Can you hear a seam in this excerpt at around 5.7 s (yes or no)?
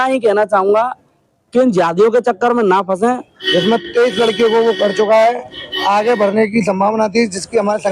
no